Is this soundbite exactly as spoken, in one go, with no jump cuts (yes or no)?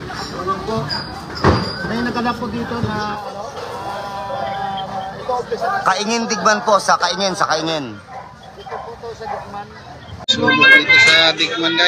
no